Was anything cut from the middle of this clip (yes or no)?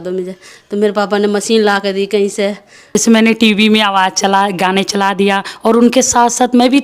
yes